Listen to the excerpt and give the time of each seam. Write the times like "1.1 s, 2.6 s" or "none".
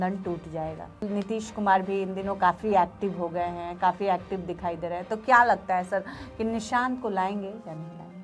1.0 s